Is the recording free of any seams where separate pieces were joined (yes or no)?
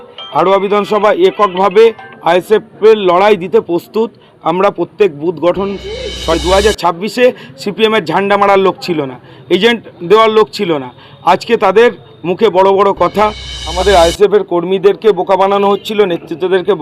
no